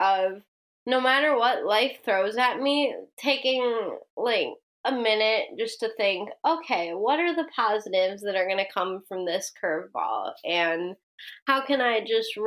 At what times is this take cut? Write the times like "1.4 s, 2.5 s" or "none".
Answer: 4.6 s